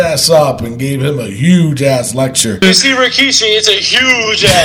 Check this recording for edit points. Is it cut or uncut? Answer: cut